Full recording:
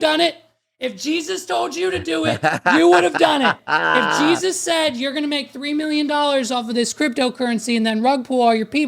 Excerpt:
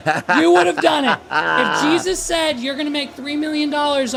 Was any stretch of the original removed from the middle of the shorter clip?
no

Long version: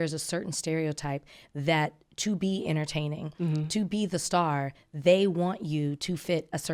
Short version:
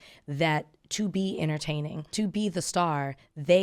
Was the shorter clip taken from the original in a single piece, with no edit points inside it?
no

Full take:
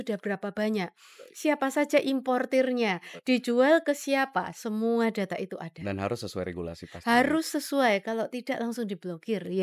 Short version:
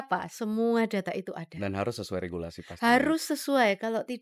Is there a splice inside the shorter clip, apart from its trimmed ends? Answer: no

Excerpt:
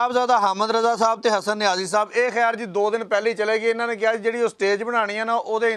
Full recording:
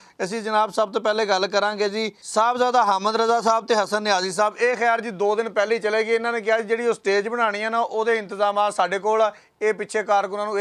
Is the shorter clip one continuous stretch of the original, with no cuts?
yes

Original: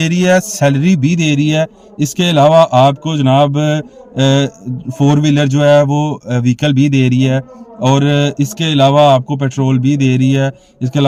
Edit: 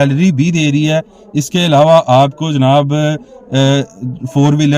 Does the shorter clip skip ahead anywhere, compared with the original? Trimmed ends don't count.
no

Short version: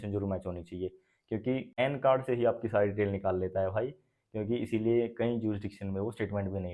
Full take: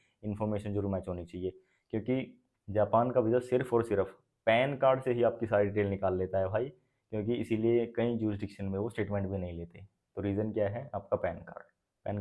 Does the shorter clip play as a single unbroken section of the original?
no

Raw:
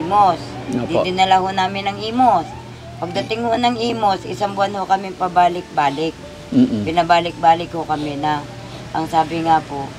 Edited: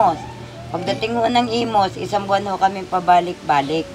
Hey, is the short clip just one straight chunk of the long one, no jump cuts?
yes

